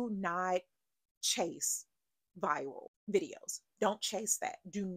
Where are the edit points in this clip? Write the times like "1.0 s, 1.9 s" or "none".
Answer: 2.9 s